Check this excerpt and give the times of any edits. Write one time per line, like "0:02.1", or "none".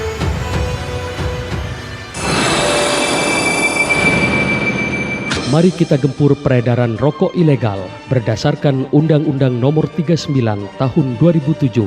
0:02.1